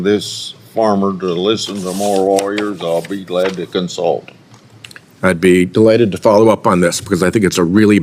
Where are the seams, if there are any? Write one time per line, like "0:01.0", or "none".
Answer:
none